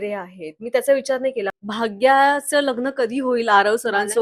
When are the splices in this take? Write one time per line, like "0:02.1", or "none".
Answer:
0:01.6